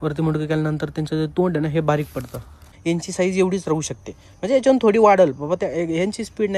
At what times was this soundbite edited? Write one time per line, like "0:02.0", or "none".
0:02.7